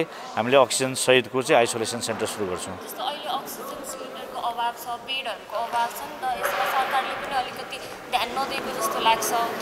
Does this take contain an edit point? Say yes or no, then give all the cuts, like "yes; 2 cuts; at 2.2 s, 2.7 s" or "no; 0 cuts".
no; 0 cuts